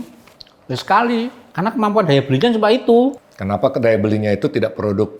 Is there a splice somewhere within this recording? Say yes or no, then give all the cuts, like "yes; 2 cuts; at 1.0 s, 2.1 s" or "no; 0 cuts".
yes; 2 cuts; at 1.4 s, 3.2 s